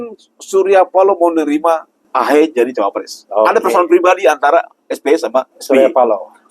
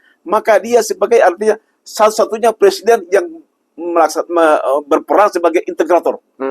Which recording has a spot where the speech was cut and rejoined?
first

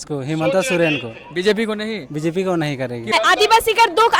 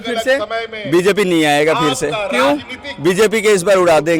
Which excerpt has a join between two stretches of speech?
first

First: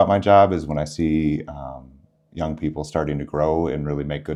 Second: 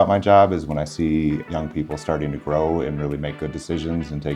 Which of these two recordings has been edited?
second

